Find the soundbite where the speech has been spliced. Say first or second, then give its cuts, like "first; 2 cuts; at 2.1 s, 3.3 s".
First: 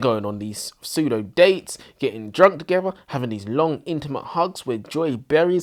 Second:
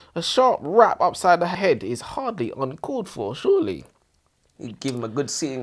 second; 1 cut; at 1.5 s